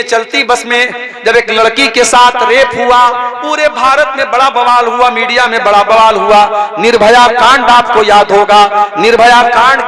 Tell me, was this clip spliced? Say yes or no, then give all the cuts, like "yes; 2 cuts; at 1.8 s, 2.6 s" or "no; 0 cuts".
no; 0 cuts